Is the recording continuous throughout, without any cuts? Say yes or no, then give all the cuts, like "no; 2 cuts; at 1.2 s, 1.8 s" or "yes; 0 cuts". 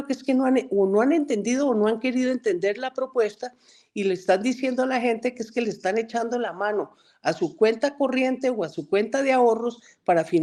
yes; 0 cuts